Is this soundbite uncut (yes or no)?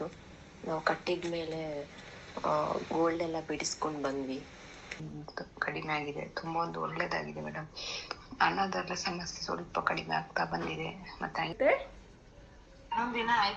no